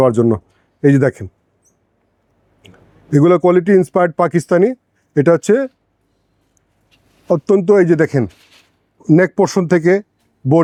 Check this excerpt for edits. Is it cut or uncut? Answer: uncut